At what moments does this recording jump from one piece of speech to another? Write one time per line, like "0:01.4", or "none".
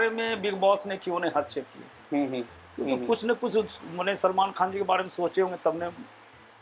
0:02.6